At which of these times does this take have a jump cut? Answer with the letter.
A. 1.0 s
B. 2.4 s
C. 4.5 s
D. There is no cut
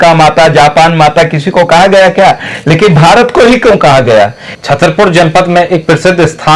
C